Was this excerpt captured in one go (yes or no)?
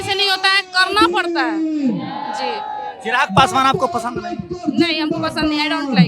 yes